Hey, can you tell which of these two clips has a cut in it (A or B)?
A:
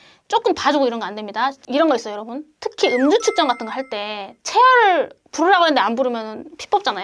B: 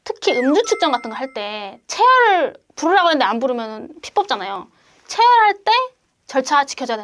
A